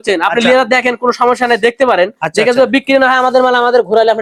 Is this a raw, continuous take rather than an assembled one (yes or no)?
yes